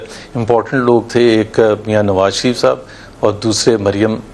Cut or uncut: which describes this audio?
uncut